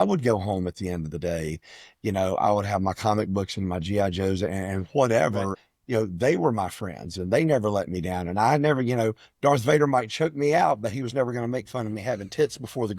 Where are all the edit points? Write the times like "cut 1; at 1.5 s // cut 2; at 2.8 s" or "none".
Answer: cut 1; at 5.6 s

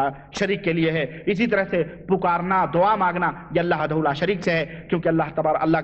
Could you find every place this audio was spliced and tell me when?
cut 1; at 3.8 s

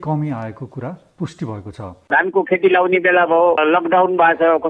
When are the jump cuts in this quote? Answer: cut 1; at 2.0 s

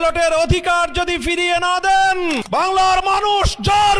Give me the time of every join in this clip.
cut 1; at 2.4 s

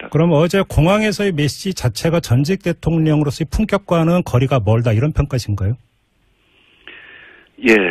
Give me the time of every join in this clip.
cut 1; at 5.8 s

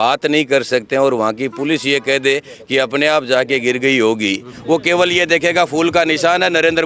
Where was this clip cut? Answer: cut 1; at 4.5 s

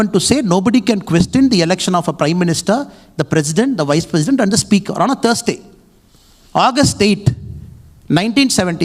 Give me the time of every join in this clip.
none

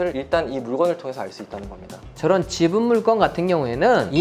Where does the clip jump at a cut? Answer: cut 1; at 2.1 s

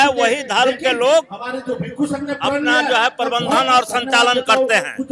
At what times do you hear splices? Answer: none

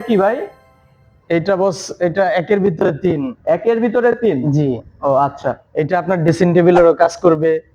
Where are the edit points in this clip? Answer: none

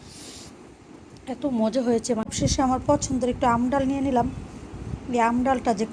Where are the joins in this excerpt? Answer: cut 1; at 2.3 s

